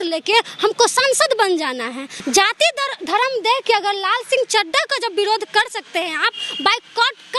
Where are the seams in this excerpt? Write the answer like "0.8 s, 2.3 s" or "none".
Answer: 2.1 s